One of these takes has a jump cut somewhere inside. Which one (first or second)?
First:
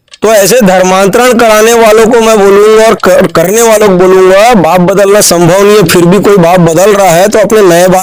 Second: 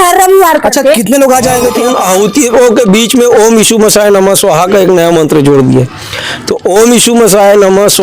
second